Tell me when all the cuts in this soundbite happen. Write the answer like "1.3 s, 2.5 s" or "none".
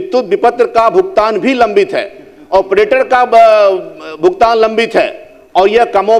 none